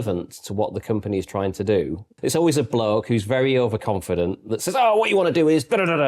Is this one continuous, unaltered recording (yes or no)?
no